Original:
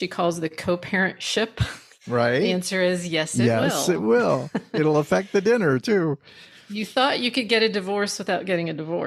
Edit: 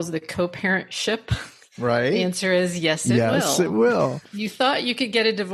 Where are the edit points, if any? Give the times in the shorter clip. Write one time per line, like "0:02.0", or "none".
0:04.2